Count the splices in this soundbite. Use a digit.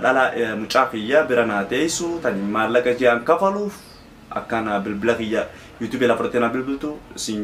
0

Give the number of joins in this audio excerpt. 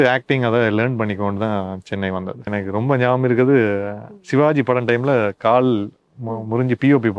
1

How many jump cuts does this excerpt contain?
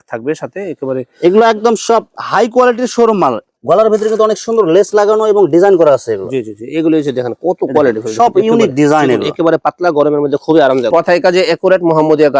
2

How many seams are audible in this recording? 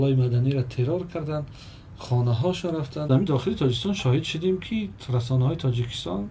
1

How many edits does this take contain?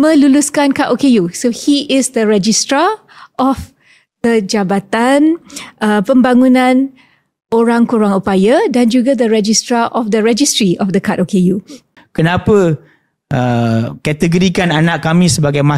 1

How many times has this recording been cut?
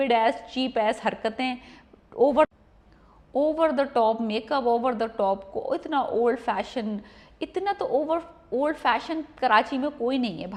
0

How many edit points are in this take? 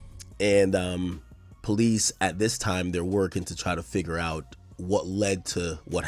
0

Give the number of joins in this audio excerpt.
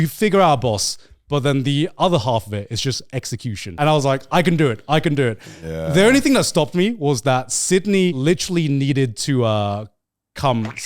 2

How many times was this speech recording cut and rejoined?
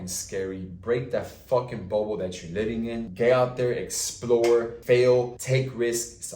3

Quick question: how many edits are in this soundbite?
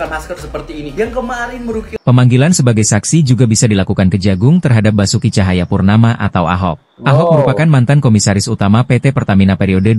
1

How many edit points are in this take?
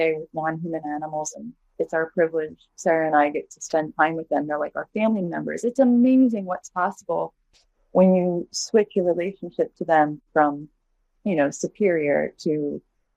0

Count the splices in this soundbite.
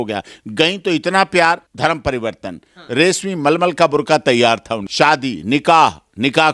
2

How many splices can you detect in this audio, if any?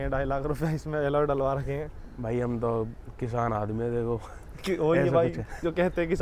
0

